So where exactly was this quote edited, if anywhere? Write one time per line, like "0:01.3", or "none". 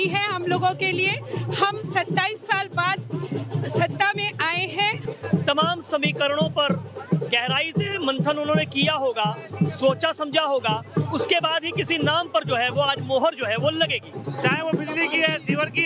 0:05.1
0:14.1